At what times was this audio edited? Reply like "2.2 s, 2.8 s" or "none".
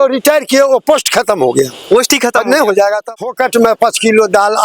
3.1 s